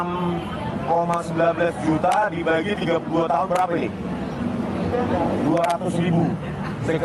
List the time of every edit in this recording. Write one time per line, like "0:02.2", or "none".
none